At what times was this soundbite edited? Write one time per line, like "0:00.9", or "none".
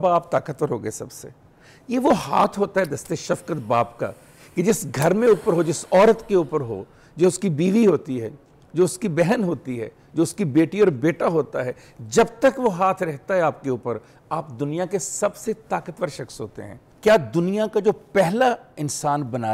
0:16.8